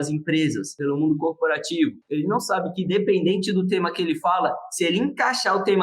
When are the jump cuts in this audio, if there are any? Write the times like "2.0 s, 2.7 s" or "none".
none